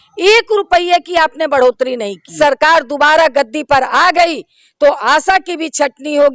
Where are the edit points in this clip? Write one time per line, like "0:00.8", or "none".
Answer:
0:02.3